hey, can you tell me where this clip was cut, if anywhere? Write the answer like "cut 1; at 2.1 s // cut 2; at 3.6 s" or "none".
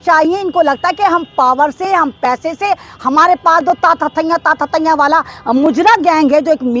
none